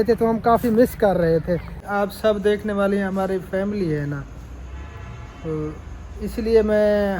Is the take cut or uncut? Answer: cut